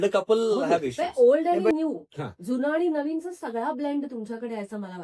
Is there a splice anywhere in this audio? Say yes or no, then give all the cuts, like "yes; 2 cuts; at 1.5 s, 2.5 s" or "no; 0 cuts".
yes; 1 cut; at 1.0 s